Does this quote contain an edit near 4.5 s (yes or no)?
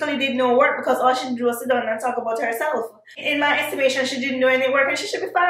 no